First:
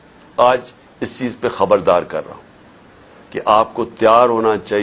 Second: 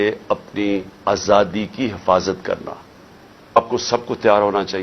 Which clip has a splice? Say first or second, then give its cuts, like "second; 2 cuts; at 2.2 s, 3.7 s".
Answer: second; 1 cut; at 3.6 s